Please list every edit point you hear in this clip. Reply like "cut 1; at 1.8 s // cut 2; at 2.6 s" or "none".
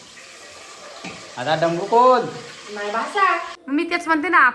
cut 1; at 3.5 s